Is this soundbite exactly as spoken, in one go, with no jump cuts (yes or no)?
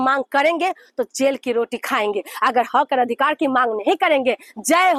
yes